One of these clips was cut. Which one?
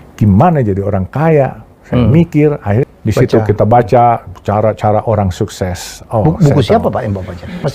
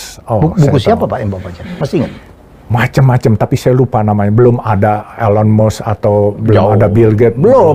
first; 1 cut; at 2.9 s

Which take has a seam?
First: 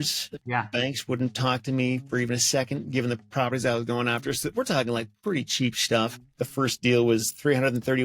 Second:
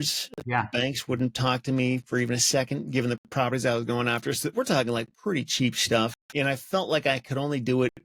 first; 1 cut; at 6.3 s

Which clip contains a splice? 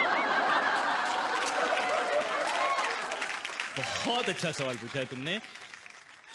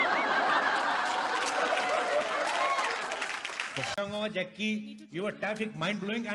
second; 1 cut; at 3.9 s

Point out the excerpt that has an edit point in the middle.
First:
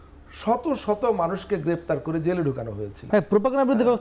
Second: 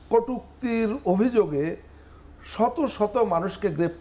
first; 1 cut; at 3.0 s

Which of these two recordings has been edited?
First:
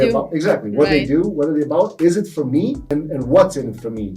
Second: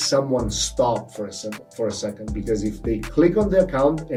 first; 1 cut; at 2.8 s

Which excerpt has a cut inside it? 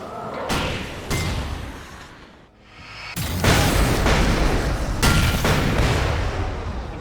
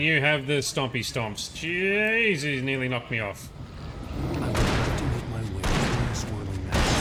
first; 1 cut; at 2.5 s

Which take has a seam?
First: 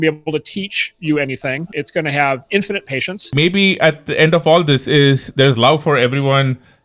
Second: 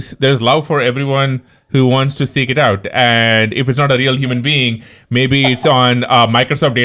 first; 2 cuts; at 1.7 s, 3.3 s

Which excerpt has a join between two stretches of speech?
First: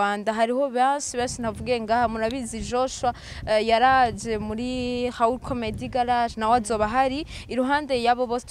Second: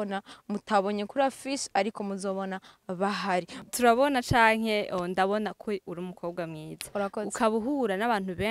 second; 1 cut; at 3.7 s

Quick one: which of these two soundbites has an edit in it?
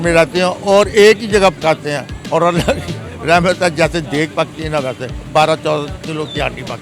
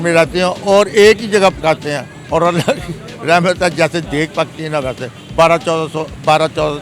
first; 1 cut; at 5.1 s

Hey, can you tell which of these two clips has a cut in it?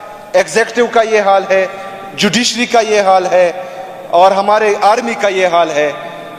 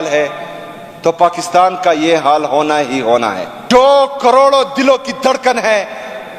second; 1 cut; at 3.5 s

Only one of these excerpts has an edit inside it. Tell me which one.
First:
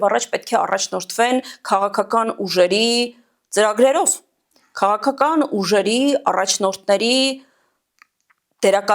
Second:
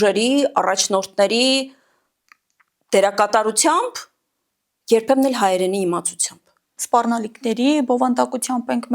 second; 1 cut; at 6.7 s

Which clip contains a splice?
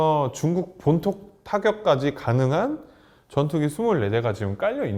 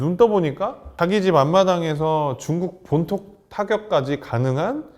second; 1 cut; at 0.9 s

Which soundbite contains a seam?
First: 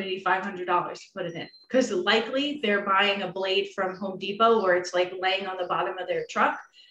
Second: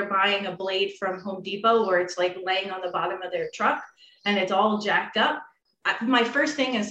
second; 1 cut; at 5.7 s

